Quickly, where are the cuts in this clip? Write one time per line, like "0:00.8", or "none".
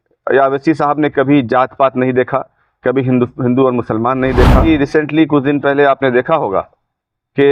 0:04.7